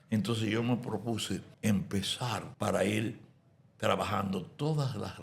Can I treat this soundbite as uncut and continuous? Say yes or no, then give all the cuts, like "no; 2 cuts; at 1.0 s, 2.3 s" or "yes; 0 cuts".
no; 2 cuts; at 1.5 s, 2.5 s